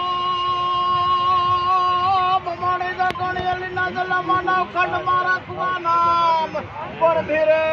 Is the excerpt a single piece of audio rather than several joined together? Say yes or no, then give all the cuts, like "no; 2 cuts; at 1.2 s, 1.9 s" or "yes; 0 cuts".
yes; 0 cuts